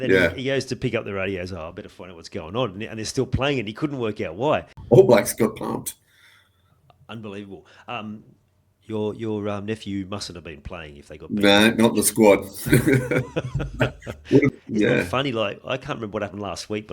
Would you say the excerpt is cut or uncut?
cut